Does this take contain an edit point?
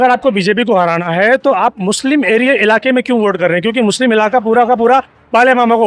no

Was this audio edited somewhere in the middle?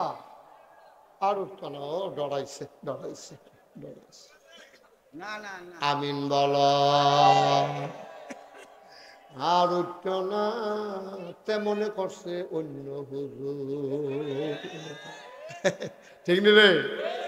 no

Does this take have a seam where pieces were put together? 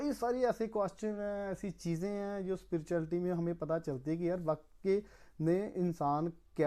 no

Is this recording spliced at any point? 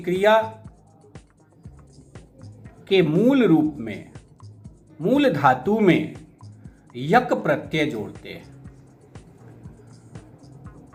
no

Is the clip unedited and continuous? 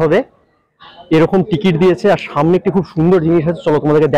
yes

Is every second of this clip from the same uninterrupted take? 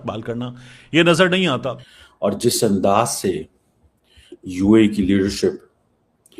no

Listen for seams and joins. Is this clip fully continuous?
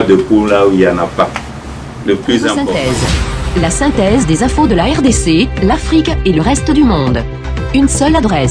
no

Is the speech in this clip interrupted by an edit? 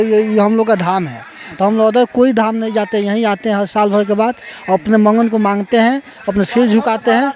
no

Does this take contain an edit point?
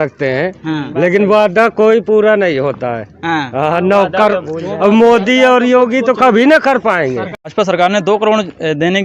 yes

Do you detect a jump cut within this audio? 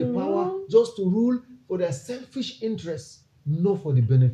no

